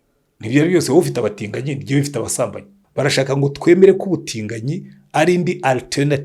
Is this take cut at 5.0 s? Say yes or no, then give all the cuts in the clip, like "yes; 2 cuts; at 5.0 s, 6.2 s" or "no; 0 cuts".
no; 1 cut; at 2.8 s